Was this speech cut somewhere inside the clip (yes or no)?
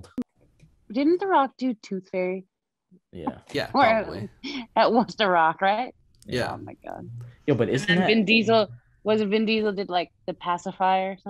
no